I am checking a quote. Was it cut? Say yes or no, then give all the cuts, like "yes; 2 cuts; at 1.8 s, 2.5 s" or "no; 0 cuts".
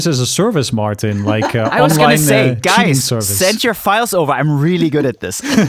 no; 0 cuts